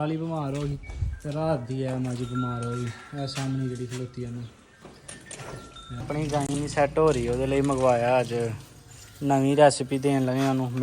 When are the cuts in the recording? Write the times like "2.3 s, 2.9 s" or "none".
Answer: 6.1 s